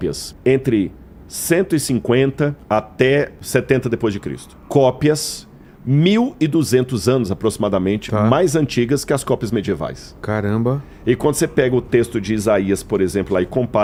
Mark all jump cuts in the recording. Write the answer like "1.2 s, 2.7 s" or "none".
none